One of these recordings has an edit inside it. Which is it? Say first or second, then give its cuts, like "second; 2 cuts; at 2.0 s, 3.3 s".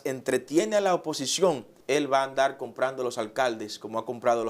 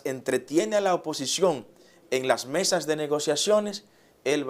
first; 1 cut; at 1.7 s